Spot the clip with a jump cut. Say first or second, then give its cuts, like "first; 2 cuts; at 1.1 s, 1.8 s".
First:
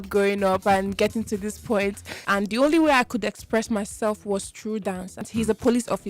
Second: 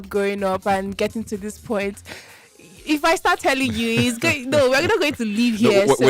first; 2 cuts; at 2.1 s, 5.2 s